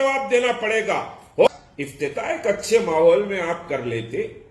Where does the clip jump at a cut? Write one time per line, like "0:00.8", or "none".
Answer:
0:01.5